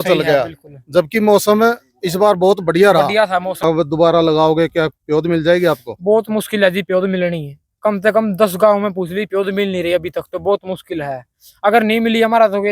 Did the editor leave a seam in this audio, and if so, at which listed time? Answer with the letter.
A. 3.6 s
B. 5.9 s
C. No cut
A